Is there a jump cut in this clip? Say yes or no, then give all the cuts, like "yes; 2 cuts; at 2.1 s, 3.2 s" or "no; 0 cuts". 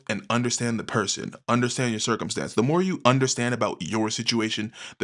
no; 0 cuts